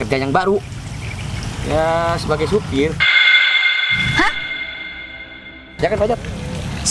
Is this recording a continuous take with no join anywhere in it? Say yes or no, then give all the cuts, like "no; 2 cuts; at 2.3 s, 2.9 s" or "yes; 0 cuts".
yes; 0 cuts